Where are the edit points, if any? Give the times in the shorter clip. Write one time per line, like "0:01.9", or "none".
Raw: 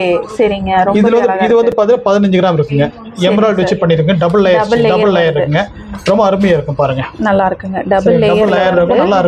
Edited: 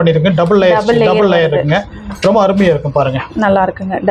none